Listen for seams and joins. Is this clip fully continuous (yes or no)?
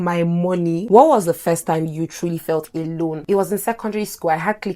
no